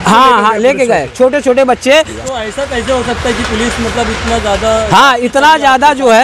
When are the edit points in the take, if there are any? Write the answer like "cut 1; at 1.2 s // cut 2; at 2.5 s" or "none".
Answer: cut 1; at 2.2 s